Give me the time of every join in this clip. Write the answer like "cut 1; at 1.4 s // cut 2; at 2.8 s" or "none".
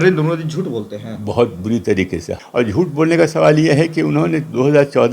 cut 1; at 2.3 s